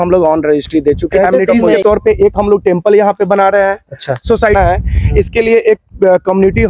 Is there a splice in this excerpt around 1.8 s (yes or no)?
yes